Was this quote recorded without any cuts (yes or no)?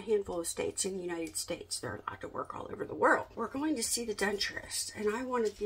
no